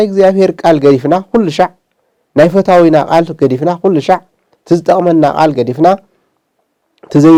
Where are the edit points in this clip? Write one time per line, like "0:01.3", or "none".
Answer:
none